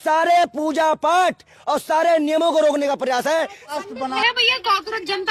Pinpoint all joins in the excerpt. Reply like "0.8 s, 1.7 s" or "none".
4.2 s